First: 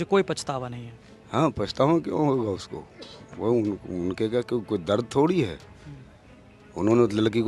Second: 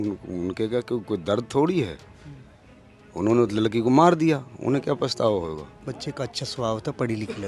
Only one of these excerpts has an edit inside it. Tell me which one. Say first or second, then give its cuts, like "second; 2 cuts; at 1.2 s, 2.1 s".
second; 1 cut; at 5.8 s